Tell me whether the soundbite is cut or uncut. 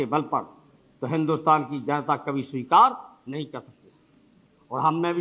uncut